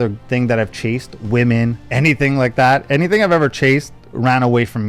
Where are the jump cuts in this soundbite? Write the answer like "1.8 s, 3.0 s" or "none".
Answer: none